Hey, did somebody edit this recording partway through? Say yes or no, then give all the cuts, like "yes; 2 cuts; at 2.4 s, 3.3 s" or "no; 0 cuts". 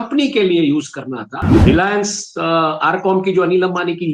yes; 1 cut; at 1.6 s